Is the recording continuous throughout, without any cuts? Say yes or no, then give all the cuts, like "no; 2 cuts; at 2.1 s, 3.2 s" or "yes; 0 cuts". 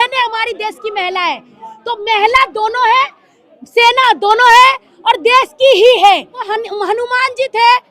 no; 1 cut; at 6.5 s